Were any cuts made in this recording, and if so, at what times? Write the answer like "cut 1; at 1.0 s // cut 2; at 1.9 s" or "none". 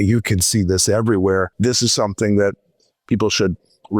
cut 1; at 1.5 s